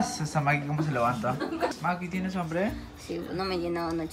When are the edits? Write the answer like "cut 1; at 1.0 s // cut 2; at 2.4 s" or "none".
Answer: cut 1; at 1.7 s